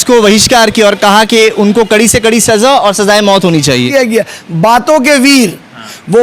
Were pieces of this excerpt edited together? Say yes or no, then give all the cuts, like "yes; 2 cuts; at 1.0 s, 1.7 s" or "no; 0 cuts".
yes; 1 cut; at 3.9 s